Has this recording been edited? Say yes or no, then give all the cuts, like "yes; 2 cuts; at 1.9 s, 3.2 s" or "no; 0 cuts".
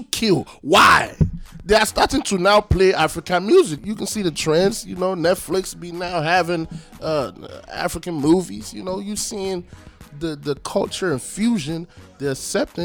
yes; 1 cut; at 3.8 s